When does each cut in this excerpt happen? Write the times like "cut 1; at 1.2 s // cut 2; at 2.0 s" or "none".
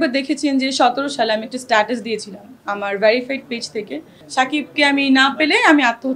cut 1; at 4.1 s